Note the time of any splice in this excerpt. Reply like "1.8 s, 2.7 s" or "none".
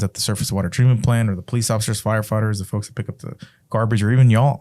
none